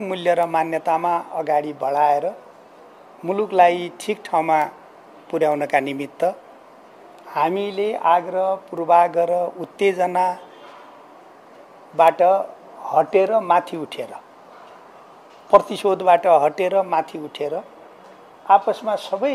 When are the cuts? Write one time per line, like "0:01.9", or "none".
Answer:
none